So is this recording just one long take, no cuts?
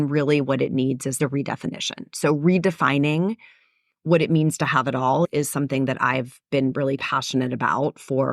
no; 2 cuts; at 1.2 s, 5.3 s

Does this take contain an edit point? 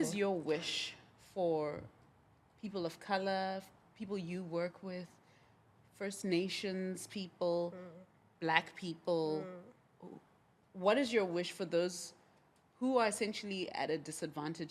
no; 0 cuts

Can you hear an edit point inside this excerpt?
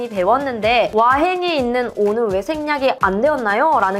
yes; 1 cut; at 0.9 s

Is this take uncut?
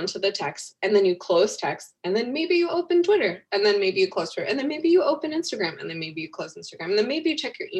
yes; 0 cuts

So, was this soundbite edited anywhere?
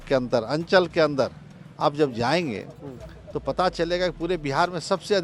no; 0 cuts

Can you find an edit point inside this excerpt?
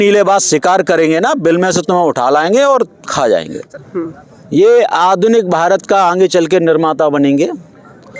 yes; 1 cut; at 3.7 s

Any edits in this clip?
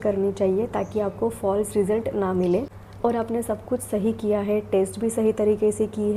no; 0 cuts

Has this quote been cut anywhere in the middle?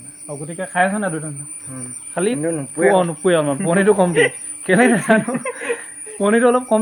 no; 0 cuts

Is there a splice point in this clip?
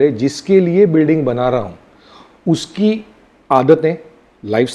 no; 0 cuts

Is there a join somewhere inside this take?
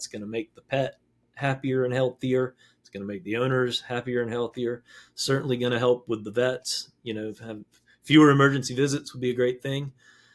no; 0 cuts

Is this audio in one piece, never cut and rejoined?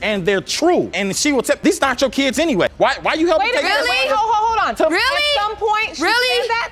no; 1 cut; at 0.9 s

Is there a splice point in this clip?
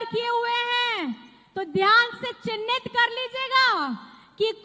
no; 0 cuts

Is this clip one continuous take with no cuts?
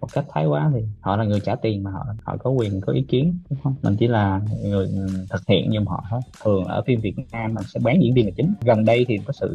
no; 2 cuts; at 6.3 s, 8.6 s

